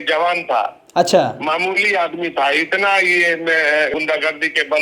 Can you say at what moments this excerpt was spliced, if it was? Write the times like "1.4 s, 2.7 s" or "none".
3.9 s